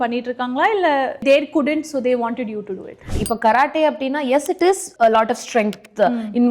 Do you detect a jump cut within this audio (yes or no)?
yes